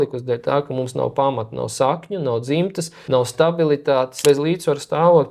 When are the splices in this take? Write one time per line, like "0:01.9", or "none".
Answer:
0:02.9
0:04.2